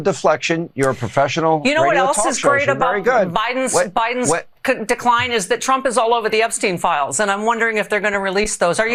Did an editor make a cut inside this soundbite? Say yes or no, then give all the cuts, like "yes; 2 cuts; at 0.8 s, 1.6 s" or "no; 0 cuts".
no; 0 cuts